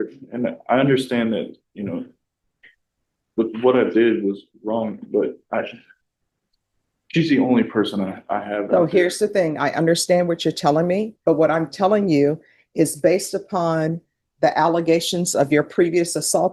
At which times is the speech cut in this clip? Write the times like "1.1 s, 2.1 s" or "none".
none